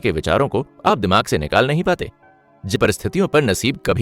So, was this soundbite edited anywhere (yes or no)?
yes